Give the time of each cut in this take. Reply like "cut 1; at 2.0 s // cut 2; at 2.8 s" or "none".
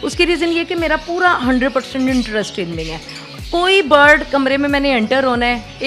none